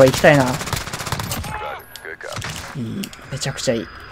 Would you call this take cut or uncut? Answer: cut